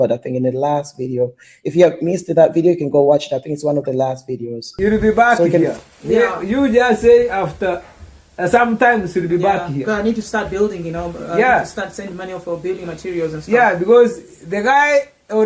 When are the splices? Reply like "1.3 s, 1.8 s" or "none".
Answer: 4.6 s

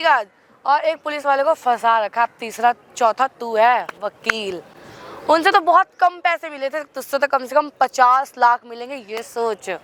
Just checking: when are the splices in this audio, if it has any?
none

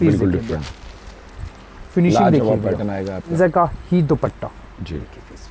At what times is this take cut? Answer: 3.3 s

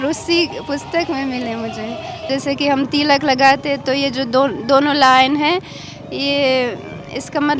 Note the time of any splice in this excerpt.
2.3 s

